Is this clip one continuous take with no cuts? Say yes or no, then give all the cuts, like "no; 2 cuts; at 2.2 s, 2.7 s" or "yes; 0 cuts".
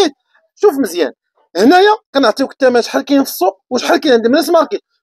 yes; 0 cuts